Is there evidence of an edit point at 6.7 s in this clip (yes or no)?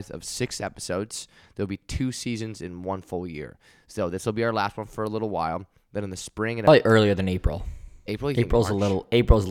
yes